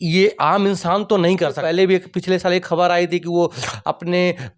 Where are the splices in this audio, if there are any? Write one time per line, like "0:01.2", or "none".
0:01.6

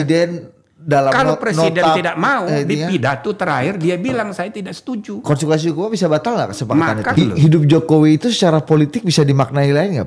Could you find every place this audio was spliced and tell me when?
0:07.1

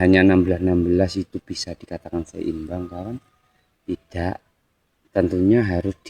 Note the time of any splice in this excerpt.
none

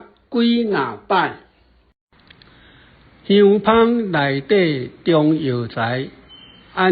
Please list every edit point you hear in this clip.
0:01.9

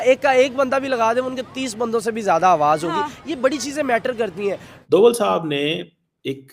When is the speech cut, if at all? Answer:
0:04.7

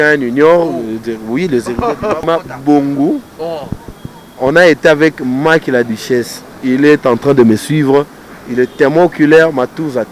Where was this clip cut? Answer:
0:02.2

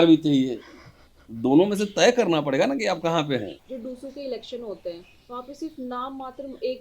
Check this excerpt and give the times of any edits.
0:03.6

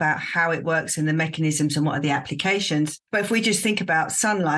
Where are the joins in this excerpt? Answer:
0:03.0

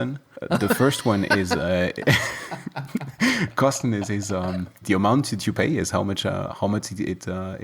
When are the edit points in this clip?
0:04.7

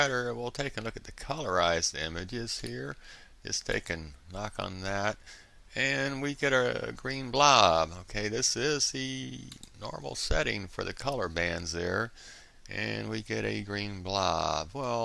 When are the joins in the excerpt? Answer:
0:10.6

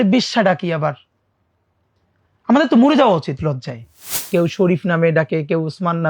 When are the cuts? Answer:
0:04.1

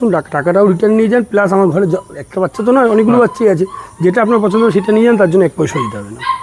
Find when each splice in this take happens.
none

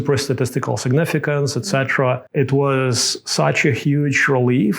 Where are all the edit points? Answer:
0:02.2

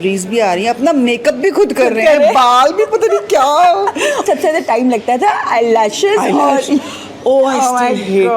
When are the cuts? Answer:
0:04.2

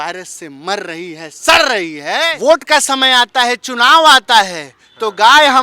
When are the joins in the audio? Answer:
0:02.3

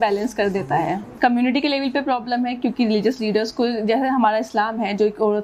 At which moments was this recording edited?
0:01.1

